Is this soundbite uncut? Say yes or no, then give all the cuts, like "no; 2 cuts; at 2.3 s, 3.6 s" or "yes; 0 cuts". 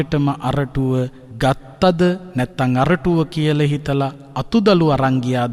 no; 1 cut; at 1.2 s